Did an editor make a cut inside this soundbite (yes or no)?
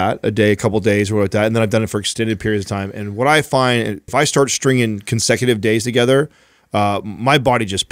yes